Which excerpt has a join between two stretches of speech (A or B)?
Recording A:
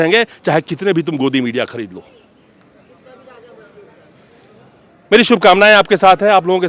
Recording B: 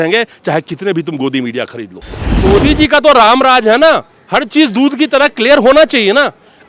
B